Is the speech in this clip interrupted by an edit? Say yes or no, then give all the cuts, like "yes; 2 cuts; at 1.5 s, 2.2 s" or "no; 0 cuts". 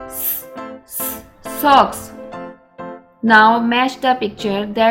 no; 0 cuts